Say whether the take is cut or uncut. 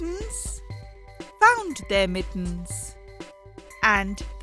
uncut